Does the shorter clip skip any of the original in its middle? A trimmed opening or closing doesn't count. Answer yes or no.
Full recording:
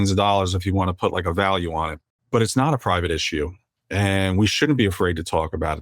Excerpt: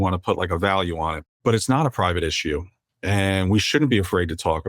yes